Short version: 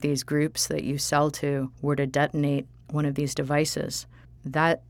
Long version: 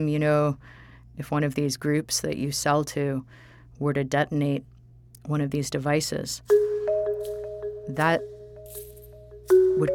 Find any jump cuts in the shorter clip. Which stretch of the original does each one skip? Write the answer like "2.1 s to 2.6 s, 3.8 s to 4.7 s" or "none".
3.3 s to 3.7 s, 4.8 s to 5.1 s, 6.4 s to 7.4 s